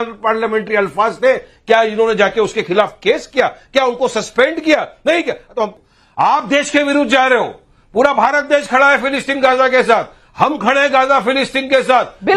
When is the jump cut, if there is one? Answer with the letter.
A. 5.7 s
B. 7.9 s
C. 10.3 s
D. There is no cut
A